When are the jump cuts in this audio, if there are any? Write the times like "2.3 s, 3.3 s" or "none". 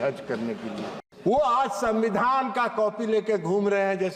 1.0 s

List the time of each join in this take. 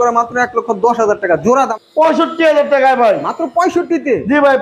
1.7 s

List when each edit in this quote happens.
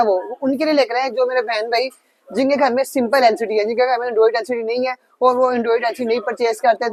none

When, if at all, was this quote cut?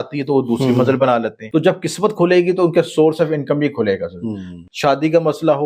1.4 s, 4.5 s

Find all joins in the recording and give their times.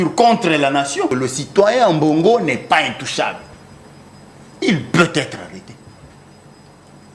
1.2 s

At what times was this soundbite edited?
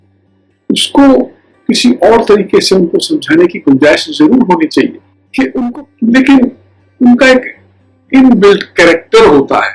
5.6 s

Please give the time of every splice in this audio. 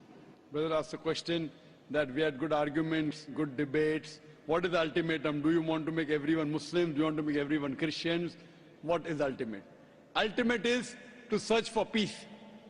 9.9 s

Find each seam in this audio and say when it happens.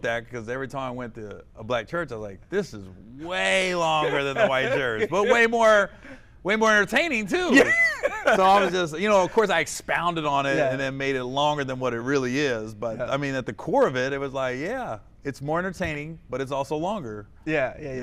none

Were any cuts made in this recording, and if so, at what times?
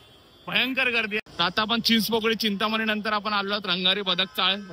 1.2 s

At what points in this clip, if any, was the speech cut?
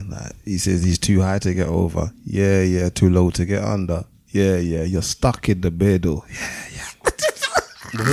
none

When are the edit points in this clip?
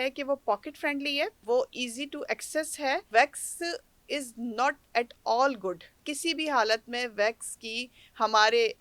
3.1 s, 5.9 s

